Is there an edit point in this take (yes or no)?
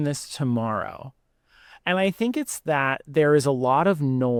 no